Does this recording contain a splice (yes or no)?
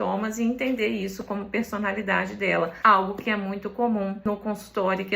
yes